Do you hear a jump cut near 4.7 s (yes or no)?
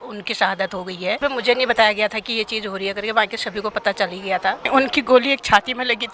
yes